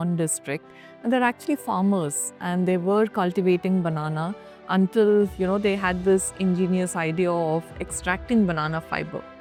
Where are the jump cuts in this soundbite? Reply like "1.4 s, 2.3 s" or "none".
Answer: none